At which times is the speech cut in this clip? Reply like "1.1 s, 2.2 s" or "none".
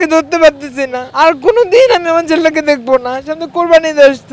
none